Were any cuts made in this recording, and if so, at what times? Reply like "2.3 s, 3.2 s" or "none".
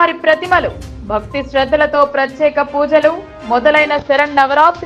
none